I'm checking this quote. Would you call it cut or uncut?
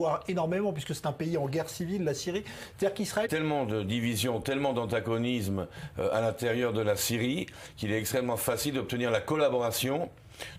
uncut